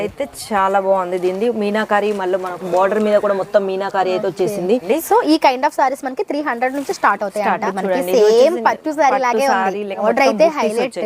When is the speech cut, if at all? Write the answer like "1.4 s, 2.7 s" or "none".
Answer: 4.8 s, 7.6 s, 10.0 s

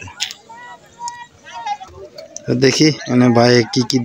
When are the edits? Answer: 1.9 s

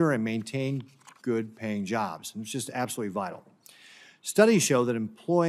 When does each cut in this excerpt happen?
3.8 s

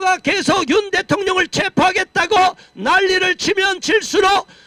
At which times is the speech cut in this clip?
none

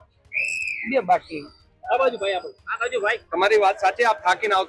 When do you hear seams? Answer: none

